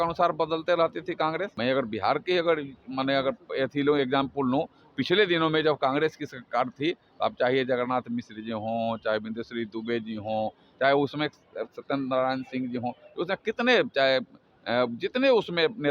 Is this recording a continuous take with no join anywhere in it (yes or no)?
no